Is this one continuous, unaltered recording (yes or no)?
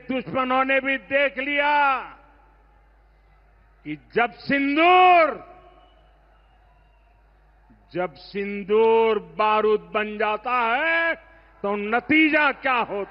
yes